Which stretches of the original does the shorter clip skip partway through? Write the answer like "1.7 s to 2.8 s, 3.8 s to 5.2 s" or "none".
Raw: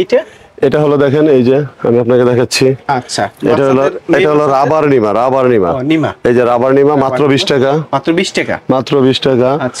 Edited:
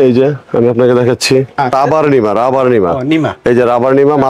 3.0 s to 4.5 s

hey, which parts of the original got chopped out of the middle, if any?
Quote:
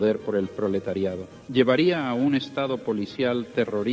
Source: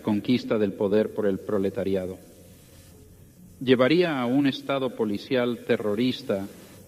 2.2 s to 3.4 s

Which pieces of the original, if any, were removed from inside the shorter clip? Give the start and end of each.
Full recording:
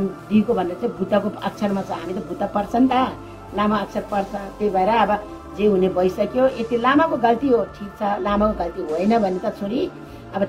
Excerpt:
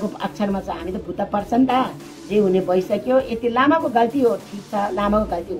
3.3 s to 5.4 s

